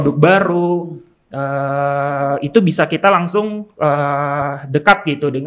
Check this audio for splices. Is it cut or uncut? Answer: uncut